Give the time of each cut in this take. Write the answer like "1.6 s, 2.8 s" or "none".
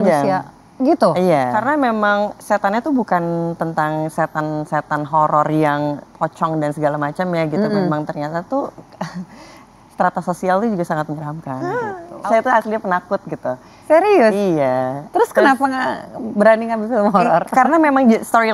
1.5 s, 11.7 s